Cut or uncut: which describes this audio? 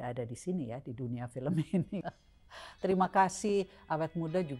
cut